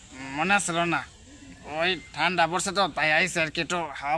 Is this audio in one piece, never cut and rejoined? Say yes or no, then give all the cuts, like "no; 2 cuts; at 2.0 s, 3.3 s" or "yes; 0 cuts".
yes; 0 cuts